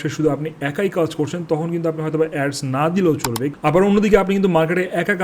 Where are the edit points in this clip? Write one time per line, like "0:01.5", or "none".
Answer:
0:03.5